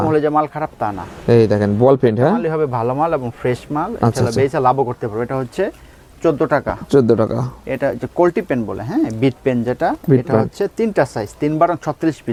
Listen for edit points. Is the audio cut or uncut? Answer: uncut